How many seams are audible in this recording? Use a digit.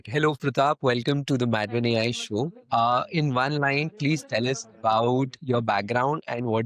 0